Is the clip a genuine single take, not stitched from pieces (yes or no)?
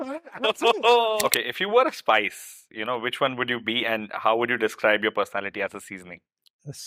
no